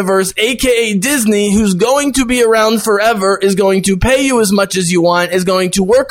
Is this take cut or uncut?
uncut